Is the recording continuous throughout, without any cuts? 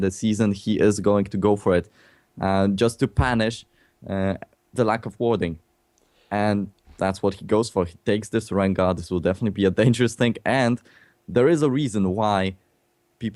yes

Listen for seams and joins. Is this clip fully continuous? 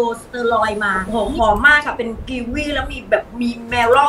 no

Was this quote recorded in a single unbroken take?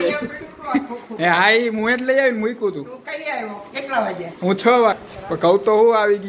no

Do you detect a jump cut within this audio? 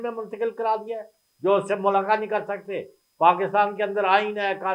no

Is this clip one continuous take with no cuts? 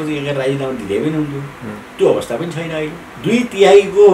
no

